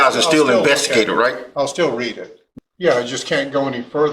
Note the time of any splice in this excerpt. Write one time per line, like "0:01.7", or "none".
0:02.4